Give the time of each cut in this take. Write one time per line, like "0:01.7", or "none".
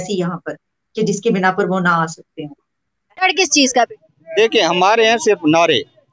0:03.2